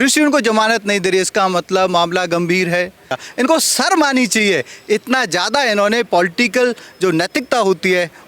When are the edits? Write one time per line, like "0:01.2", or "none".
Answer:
0:03.2